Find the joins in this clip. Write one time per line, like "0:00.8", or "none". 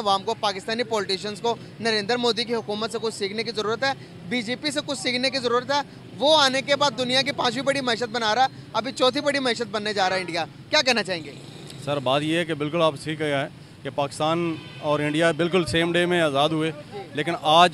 none